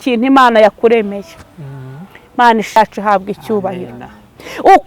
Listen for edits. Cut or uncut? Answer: cut